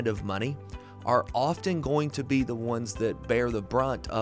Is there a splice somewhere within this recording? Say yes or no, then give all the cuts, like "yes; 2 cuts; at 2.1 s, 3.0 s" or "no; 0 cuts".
no; 0 cuts